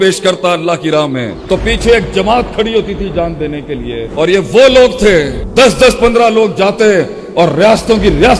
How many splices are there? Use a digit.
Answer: 0